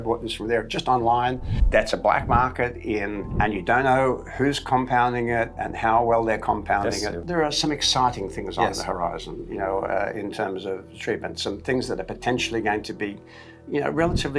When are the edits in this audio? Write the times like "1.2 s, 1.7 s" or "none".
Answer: 1.6 s, 3.2 s, 7.2 s

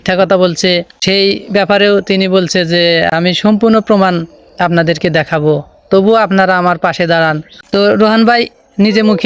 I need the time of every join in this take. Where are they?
0.9 s, 3.1 s, 7.5 s

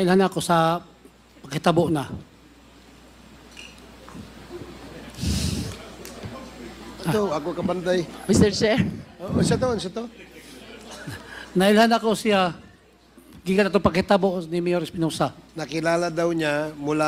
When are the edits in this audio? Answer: none

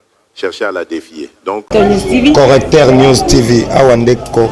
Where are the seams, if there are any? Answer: 1.6 s

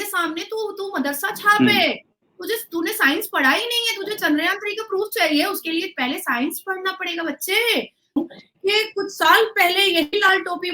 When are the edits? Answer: 8.2 s

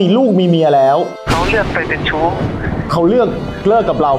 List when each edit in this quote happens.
1.2 s

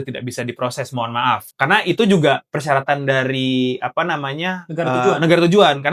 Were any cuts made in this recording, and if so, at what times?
1.5 s

